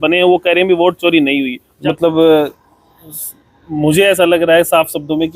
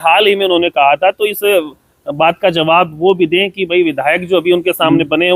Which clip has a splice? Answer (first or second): first